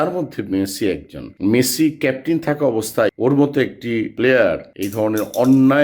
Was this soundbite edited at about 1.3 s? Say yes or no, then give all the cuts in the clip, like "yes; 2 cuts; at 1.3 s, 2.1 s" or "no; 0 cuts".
yes; 2 cuts; at 1.3 s, 3.1 s